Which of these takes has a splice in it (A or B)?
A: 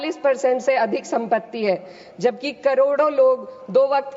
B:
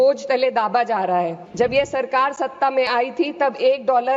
B